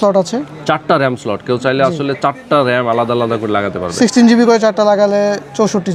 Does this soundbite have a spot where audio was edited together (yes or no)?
no